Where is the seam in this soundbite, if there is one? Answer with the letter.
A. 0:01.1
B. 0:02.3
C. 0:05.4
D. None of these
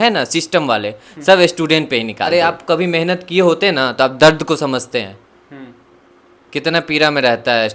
B